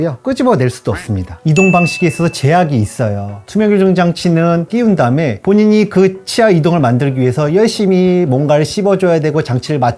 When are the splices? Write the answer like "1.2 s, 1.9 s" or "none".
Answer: 3.4 s